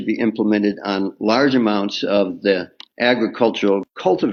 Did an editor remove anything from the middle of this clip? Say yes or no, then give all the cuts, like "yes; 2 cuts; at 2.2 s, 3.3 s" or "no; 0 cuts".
no; 0 cuts